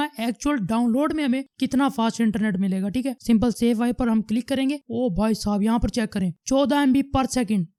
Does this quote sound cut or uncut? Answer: uncut